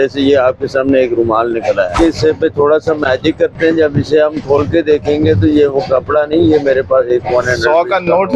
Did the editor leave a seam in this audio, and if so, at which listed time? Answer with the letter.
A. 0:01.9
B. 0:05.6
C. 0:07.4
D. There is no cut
A